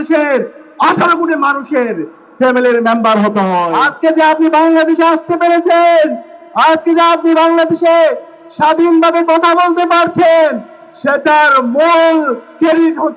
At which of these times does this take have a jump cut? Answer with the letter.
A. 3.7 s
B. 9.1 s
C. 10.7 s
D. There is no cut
A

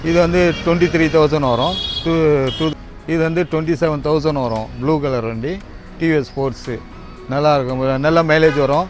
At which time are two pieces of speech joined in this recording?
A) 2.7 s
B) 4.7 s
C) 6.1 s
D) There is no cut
A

